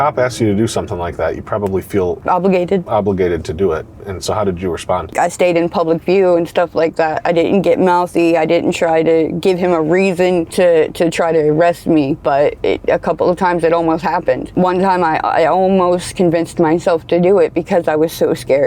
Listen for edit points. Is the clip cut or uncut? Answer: cut